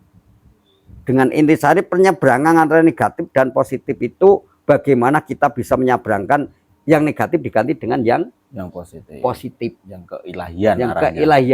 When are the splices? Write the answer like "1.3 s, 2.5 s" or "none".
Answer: 6.6 s